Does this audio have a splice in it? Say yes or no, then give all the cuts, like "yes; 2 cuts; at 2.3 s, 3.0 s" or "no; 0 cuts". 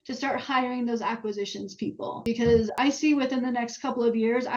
yes; 2 cuts; at 2.2 s, 2.7 s